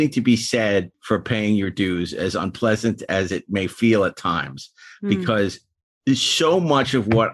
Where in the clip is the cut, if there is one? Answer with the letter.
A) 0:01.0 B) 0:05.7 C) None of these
A